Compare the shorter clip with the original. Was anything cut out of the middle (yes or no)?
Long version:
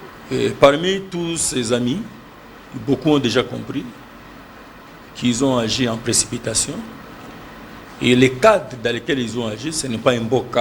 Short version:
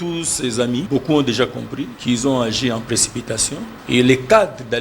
yes